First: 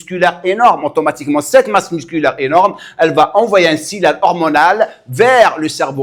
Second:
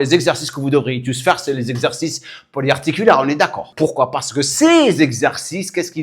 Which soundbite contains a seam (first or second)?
second